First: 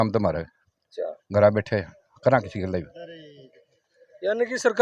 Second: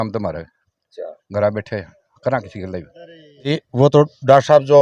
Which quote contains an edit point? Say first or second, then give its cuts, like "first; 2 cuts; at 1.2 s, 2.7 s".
second; 1 cut; at 3.6 s